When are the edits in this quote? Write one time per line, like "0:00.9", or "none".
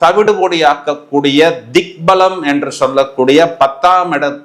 none